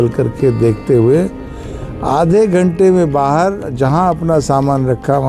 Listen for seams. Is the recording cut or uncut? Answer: uncut